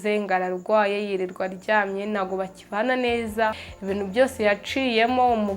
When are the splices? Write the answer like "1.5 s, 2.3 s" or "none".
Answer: 3.7 s